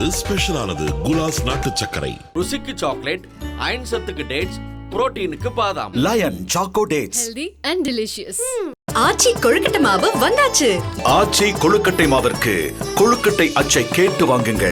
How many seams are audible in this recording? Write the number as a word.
zero